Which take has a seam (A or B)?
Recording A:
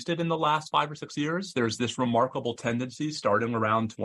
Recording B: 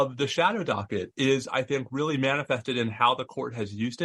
A